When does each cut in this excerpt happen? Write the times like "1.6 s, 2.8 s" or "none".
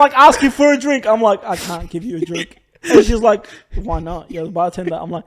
none